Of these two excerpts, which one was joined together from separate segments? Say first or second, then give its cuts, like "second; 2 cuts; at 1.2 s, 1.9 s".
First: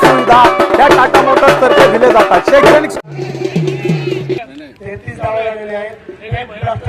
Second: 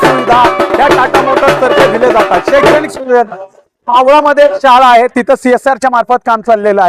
first; 1 cut; at 2.9 s